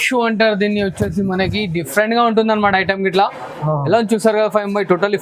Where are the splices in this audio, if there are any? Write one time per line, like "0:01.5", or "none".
none